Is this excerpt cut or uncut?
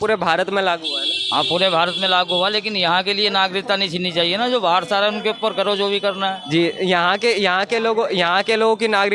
uncut